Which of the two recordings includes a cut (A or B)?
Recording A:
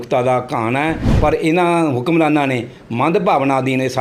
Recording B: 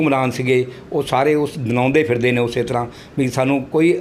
A